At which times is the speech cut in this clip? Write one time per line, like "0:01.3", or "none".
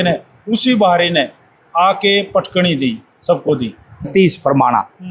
0:04.1